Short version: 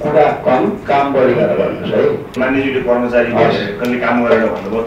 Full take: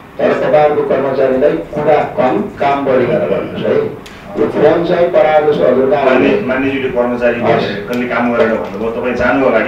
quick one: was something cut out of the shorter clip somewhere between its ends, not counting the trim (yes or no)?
yes